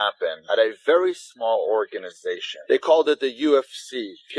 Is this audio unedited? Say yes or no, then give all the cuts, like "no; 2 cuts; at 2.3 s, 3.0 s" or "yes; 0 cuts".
yes; 0 cuts